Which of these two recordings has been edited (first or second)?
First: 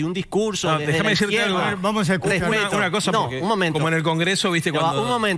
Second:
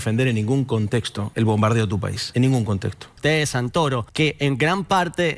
second